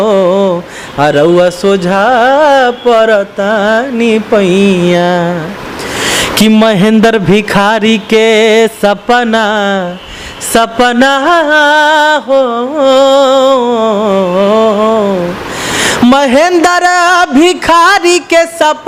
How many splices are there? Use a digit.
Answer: 0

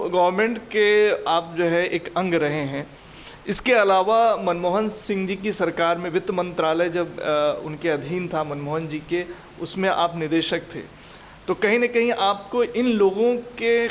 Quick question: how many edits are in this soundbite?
0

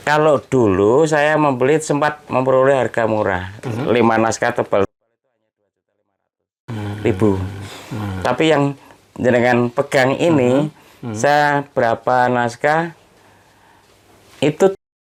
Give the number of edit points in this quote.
0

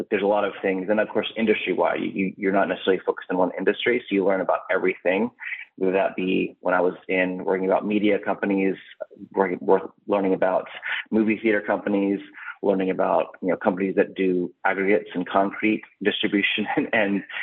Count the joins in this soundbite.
0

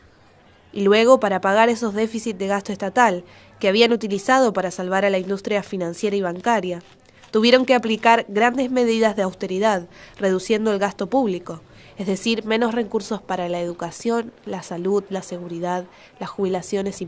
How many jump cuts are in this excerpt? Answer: 1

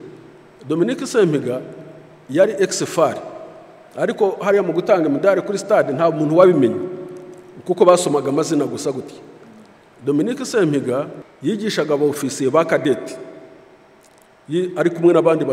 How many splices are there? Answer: 1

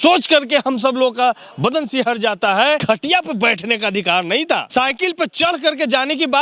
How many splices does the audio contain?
2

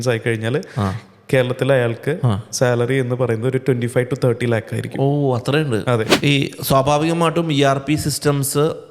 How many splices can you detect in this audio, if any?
1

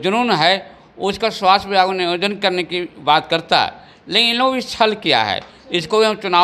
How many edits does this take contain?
0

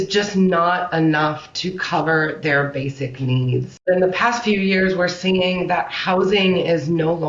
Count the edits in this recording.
1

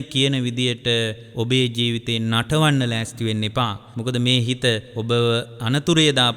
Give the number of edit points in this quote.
4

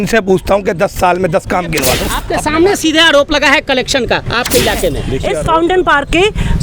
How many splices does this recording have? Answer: 2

